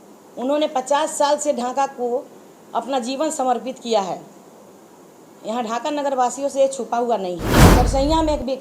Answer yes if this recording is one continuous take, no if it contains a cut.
no